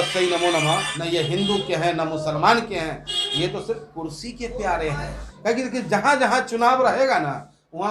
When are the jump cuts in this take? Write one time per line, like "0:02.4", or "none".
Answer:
0:00.9
0:05.1